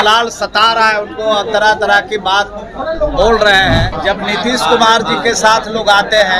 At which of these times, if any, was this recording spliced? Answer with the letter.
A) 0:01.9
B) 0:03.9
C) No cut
B